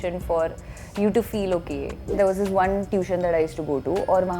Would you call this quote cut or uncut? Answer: cut